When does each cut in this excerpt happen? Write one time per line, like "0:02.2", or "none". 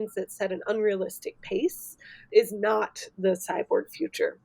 0:02.3